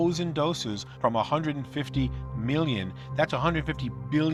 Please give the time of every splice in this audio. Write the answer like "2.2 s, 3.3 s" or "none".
none